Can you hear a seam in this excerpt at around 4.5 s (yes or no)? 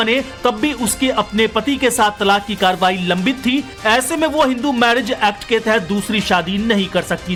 no